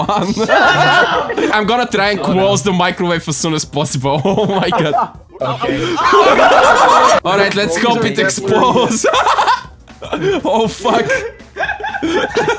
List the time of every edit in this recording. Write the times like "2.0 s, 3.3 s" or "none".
1.5 s, 7.2 s